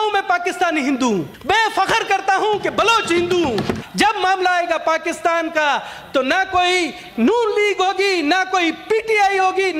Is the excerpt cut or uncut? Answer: cut